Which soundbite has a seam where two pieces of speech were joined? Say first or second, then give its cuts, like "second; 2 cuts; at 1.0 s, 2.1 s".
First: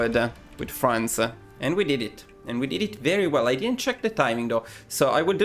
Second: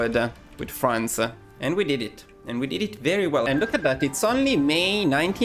second; 1 cut; at 3.4 s